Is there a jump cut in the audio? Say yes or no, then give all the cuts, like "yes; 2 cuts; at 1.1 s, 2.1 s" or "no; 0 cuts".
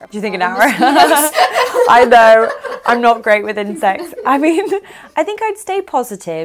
no; 0 cuts